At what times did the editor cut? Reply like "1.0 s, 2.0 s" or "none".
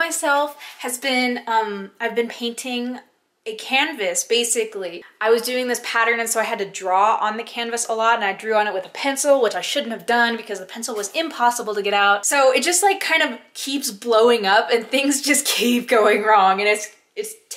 5.0 s, 12.2 s